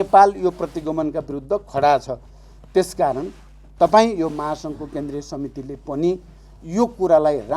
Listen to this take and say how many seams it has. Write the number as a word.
zero